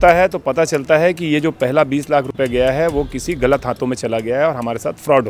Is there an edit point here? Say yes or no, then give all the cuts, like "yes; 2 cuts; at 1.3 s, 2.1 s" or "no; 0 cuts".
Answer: no; 0 cuts